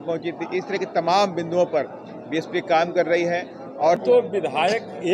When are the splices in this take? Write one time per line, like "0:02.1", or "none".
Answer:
0:04.0